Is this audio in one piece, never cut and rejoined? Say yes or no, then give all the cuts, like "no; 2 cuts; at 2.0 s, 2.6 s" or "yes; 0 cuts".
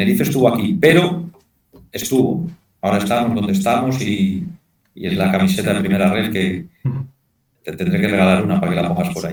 yes; 0 cuts